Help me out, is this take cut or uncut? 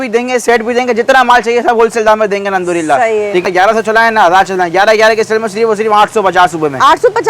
cut